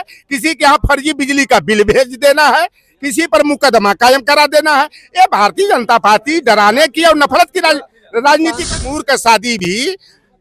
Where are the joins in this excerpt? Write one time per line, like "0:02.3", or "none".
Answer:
0:08.9